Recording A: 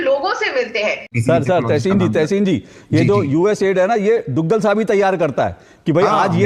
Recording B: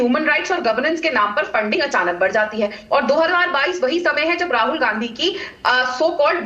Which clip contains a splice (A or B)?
A